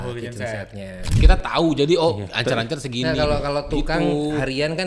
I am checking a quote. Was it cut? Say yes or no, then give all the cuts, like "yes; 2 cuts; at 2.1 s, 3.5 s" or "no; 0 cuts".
yes; 1 cut; at 1.2 s